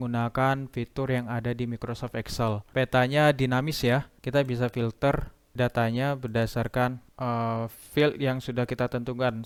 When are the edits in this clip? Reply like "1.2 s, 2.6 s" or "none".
none